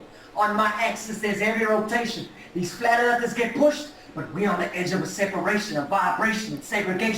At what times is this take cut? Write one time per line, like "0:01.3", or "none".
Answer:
0:06.0